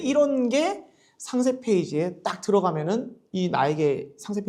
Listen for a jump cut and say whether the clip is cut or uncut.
uncut